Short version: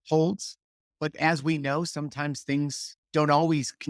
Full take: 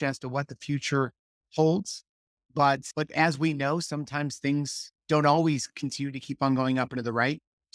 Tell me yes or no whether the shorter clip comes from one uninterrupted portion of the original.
no